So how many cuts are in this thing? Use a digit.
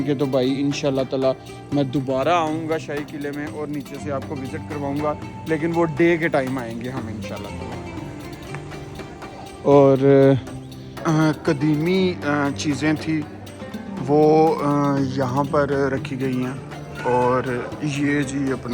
1